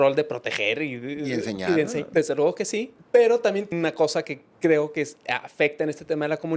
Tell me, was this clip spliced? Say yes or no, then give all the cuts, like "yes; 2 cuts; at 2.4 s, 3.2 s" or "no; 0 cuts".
yes; 3 cuts; at 2.1 s, 3.0 s, 3.7 s